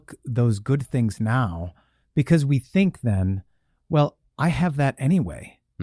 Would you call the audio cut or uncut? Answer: uncut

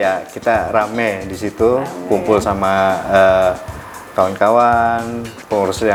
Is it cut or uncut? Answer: uncut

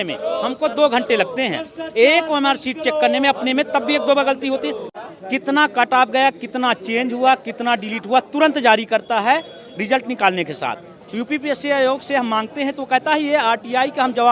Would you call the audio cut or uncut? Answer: cut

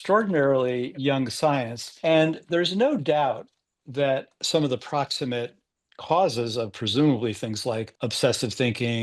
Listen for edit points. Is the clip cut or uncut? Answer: cut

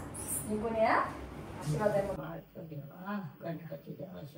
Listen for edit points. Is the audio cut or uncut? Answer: cut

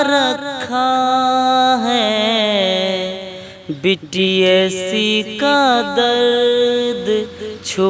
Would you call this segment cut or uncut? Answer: uncut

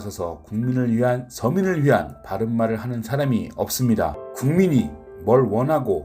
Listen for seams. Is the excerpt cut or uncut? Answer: cut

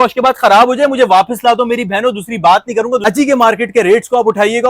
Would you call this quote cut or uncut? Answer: cut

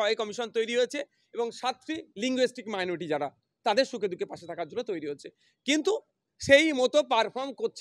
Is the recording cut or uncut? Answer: uncut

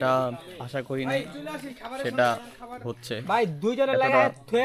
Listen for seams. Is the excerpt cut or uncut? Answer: uncut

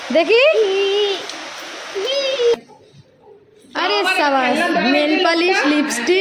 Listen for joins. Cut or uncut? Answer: cut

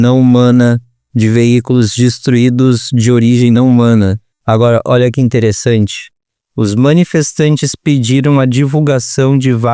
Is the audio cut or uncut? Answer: cut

